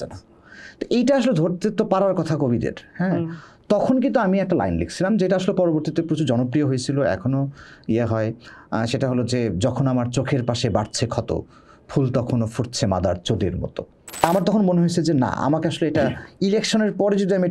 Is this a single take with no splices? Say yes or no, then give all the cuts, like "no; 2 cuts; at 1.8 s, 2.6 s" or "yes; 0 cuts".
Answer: no; 1 cut; at 14.2 s